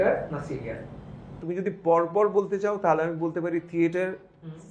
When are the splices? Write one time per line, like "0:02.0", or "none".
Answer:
0:01.4